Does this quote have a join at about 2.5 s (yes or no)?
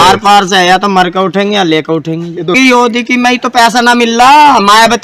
yes